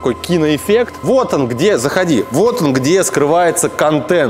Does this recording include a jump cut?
yes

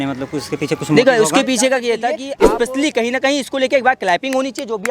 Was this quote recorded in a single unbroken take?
no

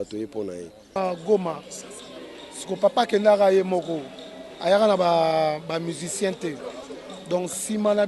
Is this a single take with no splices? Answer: no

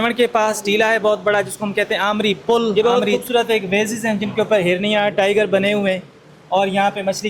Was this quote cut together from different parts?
yes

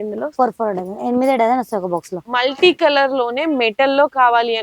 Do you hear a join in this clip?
yes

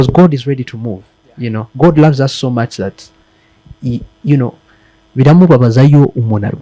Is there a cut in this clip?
no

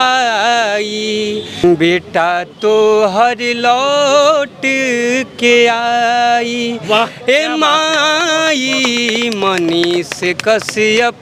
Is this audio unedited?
no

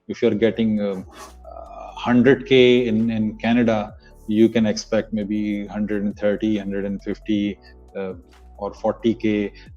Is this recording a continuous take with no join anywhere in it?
yes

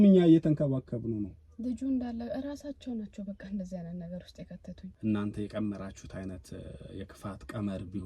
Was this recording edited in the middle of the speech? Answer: yes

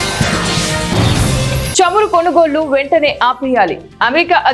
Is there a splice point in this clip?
yes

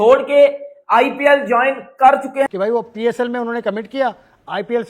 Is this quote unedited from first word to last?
no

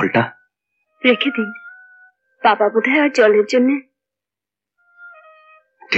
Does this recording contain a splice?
no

